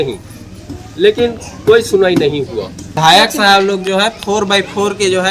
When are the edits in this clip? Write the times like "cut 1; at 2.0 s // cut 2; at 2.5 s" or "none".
cut 1; at 2.8 s